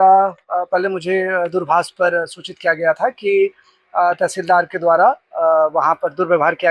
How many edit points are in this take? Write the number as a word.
zero